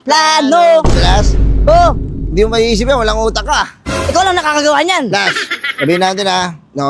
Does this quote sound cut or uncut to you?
uncut